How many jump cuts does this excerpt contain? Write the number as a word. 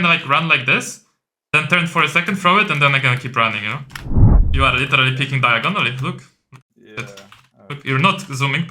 one